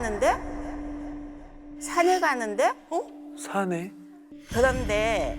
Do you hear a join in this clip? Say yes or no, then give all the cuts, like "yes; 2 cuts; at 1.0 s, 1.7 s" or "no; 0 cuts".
yes; 1 cut; at 4.3 s